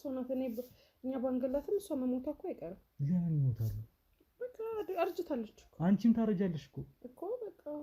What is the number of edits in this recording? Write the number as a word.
zero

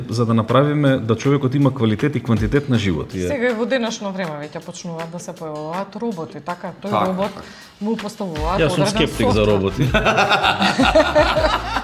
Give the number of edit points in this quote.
one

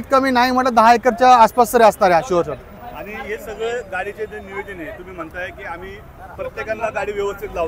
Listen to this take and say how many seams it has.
zero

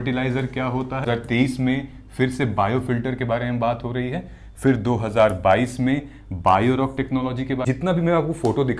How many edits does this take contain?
two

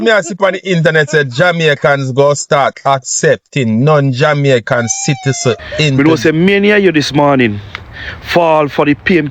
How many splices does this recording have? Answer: one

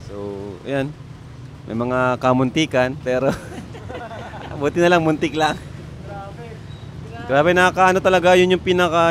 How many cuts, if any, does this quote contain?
zero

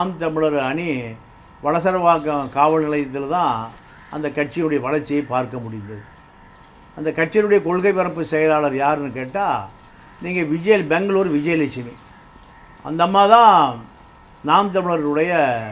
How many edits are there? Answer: zero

